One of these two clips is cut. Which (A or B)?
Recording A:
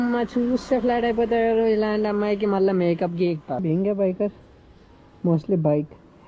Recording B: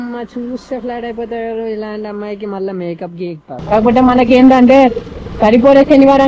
B